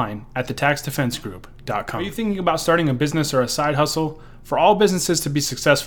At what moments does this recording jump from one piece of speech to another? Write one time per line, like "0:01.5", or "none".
0:02.1